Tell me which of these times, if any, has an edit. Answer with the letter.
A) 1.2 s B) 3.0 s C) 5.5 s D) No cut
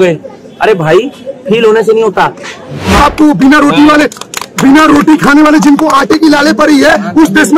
B